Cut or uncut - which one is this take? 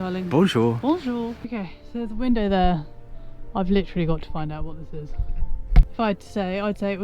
cut